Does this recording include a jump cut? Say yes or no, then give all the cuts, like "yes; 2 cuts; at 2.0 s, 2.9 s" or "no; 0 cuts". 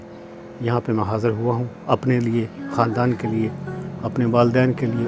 no; 0 cuts